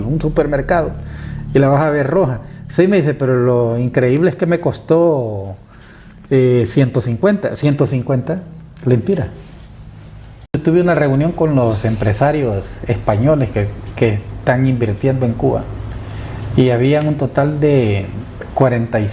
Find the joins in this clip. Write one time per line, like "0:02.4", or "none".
0:10.5